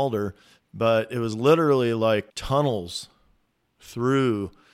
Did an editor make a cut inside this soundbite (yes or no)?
yes